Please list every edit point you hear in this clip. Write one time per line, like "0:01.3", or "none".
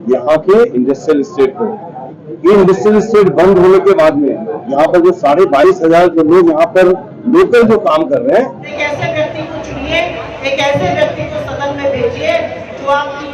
0:08.7